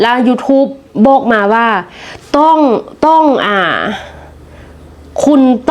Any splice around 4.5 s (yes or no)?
no